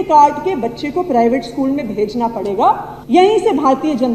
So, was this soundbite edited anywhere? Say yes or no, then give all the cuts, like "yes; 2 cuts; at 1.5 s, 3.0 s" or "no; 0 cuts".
yes; 1 cut; at 2.9 s